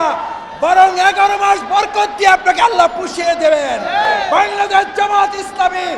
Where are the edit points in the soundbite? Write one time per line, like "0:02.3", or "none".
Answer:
0:04.1